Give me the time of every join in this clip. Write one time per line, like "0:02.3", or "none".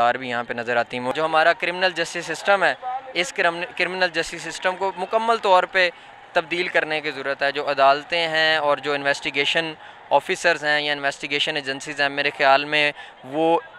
0:01.1